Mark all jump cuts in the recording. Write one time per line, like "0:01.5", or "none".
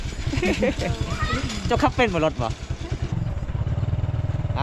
0:03.1